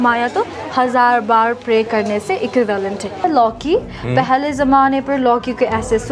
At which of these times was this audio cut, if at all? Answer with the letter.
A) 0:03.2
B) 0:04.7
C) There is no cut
A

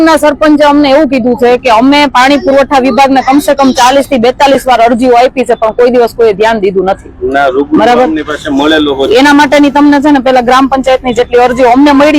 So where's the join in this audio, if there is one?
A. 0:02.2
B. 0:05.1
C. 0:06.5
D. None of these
D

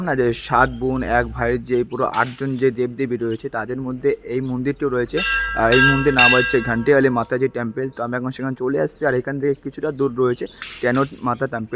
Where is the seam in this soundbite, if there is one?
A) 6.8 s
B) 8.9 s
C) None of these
C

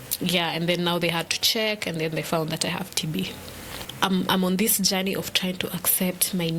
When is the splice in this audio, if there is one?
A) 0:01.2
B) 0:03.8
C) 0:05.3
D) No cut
B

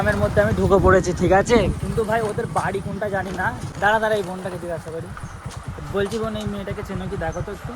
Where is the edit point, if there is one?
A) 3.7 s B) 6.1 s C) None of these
A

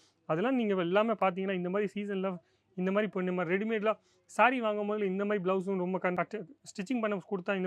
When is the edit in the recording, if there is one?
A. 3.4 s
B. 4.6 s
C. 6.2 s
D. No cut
C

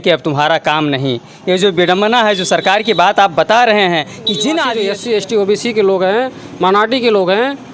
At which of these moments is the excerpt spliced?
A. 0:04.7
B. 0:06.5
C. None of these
A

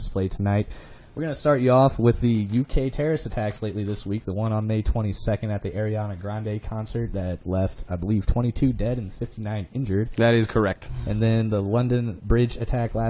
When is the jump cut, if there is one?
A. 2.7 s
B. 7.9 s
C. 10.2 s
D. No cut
D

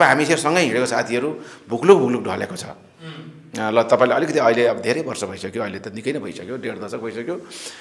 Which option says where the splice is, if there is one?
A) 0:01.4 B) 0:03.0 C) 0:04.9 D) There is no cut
D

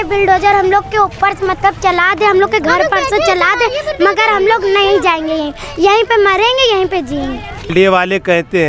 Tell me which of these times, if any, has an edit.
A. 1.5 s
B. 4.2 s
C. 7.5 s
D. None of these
C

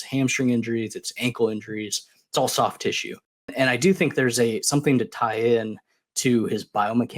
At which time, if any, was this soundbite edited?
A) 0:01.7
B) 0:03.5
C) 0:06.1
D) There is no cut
B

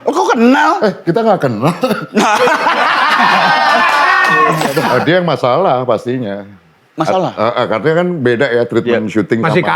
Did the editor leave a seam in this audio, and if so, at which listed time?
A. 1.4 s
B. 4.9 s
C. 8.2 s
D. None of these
B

